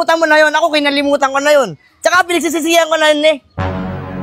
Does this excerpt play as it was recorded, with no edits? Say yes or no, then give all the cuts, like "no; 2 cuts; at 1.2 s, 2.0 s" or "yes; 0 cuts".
yes; 0 cuts